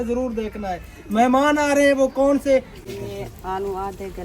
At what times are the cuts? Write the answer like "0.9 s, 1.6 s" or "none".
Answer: 2.8 s